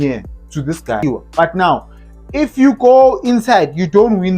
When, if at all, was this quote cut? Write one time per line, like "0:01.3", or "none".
0:01.0